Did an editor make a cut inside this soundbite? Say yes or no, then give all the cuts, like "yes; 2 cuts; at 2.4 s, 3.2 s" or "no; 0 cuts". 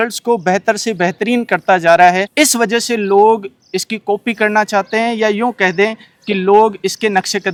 no; 0 cuts